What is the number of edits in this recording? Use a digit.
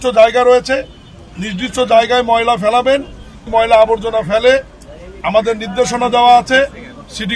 1